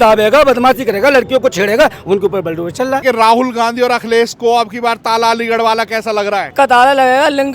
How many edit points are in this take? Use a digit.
2